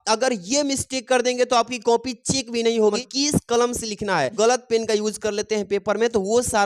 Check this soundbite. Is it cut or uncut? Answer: cut